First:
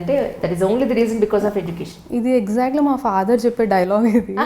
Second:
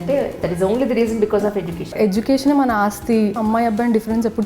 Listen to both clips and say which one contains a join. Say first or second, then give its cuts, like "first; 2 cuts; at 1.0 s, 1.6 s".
second; 2 cuts; at 1.8 s, 3.4 s